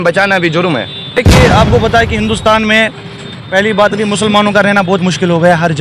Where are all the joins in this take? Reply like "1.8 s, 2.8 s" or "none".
1.2 s